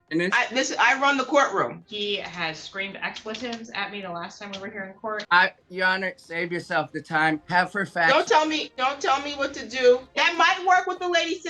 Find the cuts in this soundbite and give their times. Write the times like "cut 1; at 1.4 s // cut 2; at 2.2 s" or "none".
cut 1; at 1.9 s // cut 2; at 5.2 s // cut 3; at 7.4 s // cut 4; at 8.7 s // cut 5; at 10.1 s